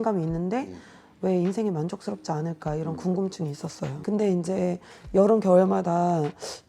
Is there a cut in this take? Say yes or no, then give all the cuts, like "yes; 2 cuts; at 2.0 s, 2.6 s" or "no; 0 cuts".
yes; 1 cut; at 3.9 s